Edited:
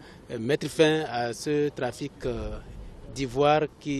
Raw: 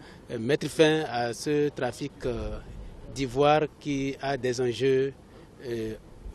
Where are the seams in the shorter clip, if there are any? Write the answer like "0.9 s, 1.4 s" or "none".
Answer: none